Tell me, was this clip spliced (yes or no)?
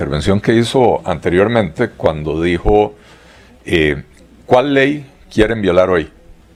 no